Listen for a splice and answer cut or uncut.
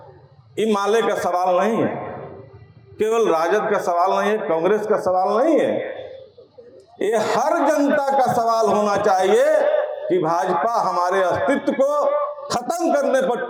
uncut